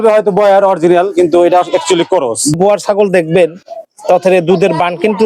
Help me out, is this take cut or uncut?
cut